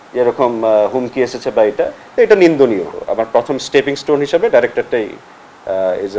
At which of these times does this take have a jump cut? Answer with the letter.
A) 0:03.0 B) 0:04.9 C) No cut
A